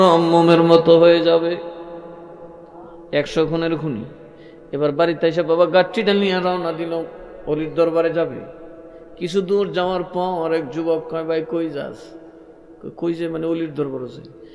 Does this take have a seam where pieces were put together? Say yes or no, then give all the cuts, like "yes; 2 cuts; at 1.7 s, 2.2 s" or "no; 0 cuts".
no; 0 cuts